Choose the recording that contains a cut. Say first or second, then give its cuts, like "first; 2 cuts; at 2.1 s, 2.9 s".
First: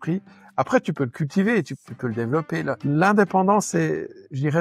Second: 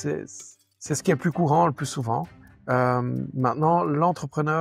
first; 1 cut; at 2.8 s